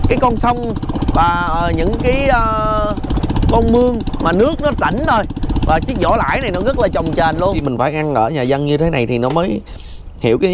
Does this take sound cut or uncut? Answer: cut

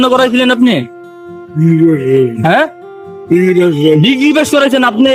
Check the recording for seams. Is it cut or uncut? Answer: uncut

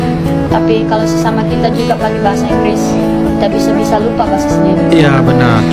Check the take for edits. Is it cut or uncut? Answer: uncut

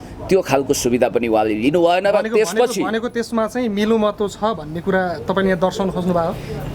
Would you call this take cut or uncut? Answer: uncut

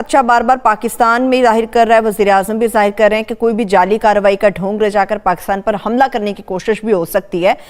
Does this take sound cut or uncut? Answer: uncut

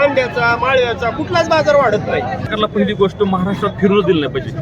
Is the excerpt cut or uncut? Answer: cut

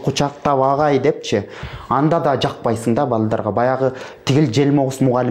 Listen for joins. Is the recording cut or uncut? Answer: cut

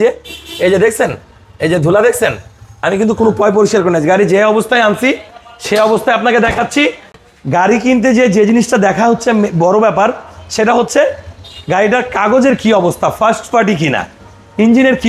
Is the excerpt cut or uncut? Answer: uncut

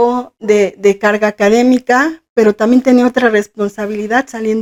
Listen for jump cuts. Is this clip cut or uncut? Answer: uncut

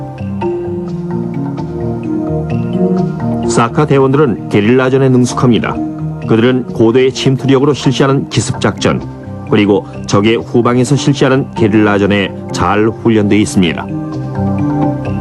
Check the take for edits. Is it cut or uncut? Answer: cut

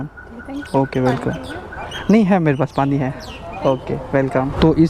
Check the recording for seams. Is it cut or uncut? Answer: uncut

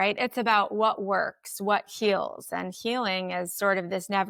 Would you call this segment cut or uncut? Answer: uncut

